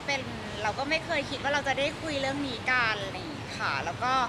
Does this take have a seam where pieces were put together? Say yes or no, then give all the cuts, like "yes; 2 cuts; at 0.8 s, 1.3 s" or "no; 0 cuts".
no; 0 cuts